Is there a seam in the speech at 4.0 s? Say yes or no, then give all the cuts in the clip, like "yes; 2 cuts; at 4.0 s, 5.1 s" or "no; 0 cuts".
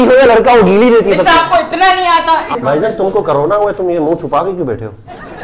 no; 1 cut; at 2.5 s